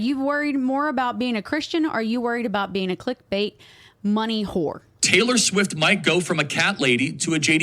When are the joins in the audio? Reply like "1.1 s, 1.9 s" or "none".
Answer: 4.9 s